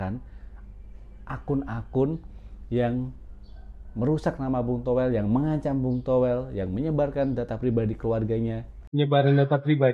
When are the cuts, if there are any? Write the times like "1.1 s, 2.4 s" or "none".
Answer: 8.7 s